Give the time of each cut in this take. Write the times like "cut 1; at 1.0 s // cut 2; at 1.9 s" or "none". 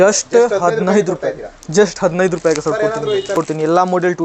cut 1; at 3.4 s

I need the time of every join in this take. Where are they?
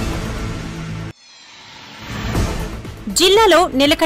cut 1; at 2.9 s

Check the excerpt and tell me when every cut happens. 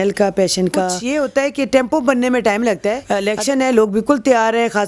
cut 1; at 1.0 s // cut 2; at 3.1 s

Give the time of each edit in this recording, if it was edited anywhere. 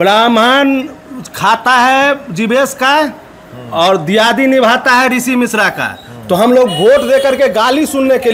none

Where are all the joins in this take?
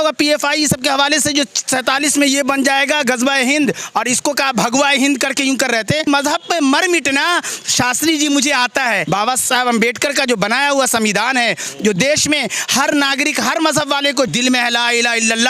cut 1; at 6.1 s // cut 2; at 9.0 s // cut 3; at 14.3 s

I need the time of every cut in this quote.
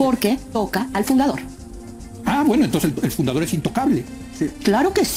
none

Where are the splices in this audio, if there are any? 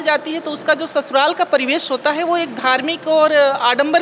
none

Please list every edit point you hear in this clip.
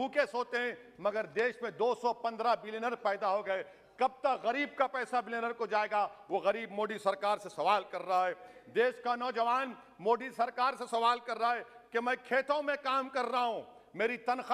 none

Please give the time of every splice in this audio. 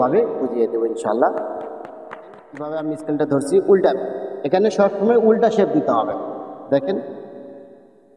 cut 1; at 2.7 s

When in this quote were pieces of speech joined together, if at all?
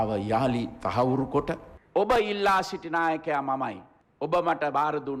cut 1; at 1.7 s

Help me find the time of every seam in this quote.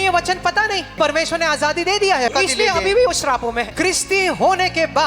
cut 1; at 1.0 s // cut 2; at 2.3 s // cut 3; at 3.7 s

